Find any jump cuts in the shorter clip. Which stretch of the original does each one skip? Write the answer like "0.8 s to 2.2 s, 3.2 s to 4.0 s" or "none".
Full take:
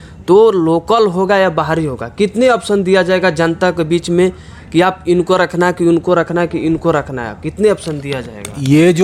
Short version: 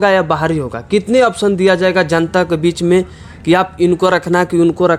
none